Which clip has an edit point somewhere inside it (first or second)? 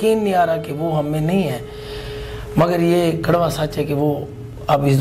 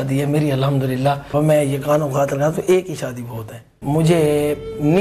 second